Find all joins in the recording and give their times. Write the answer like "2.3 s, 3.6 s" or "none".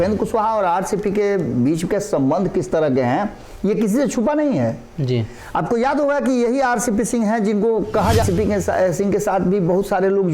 8.2 s